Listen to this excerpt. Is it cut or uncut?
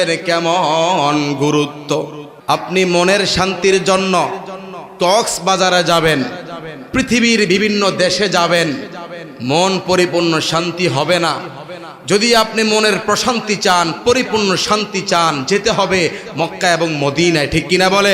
cut